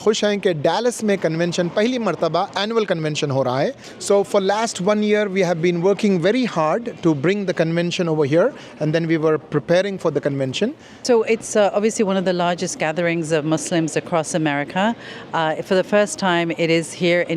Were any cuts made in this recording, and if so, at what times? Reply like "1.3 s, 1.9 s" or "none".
4.1 s, 11.0 s